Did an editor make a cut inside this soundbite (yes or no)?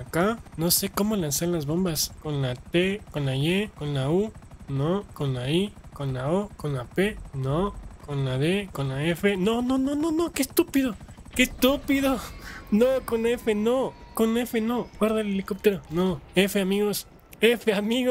yes